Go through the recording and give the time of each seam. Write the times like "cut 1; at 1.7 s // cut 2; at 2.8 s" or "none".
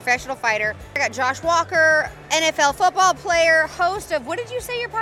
cut 1; at 1.0 s